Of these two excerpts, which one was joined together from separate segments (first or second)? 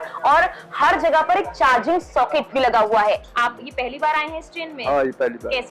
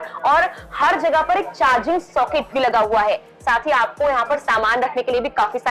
first